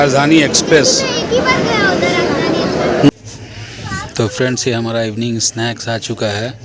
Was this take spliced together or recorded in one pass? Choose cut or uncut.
cut